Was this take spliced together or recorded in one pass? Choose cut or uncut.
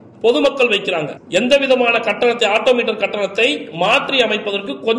cut